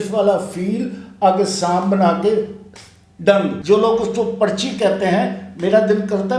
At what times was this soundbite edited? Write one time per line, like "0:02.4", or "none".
0:03.6